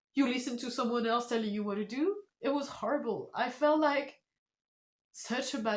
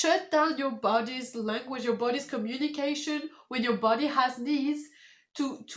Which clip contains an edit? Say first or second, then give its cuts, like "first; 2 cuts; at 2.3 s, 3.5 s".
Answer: first; 1 cut; at 2.3 s